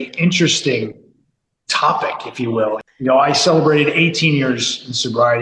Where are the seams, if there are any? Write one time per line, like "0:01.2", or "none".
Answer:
0:02.8